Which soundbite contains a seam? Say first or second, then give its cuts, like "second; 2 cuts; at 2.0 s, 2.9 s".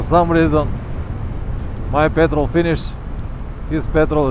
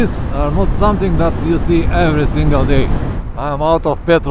second; 1 cut; at 3.2 s